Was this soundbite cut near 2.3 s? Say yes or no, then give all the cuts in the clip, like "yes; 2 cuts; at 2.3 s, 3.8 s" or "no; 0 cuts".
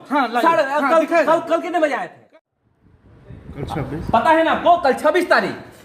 yes; 1 cut; at 2.3 s